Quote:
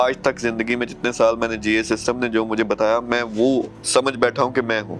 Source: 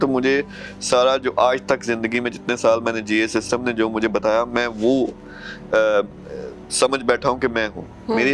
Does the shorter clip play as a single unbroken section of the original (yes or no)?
no